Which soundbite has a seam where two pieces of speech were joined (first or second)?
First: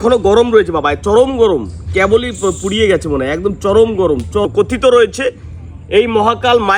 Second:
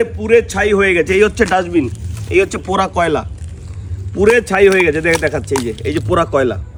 first